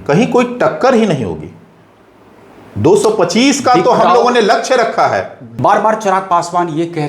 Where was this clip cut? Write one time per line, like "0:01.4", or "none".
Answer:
0:05.4